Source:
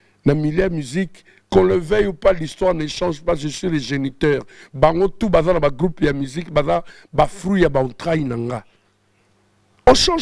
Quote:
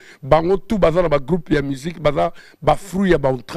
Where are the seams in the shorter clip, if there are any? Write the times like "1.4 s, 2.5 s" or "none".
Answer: none